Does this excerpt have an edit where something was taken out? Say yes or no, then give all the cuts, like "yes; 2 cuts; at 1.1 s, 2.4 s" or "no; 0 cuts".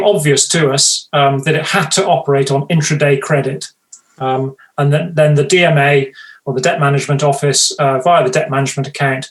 no; 0 cuts